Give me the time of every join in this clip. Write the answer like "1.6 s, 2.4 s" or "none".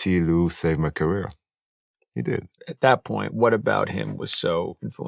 2.6 s